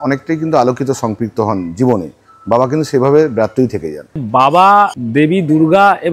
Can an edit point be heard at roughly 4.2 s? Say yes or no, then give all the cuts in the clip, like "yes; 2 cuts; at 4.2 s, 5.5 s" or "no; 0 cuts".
yes; 2 cuts; at 4.2 s, 5.0 s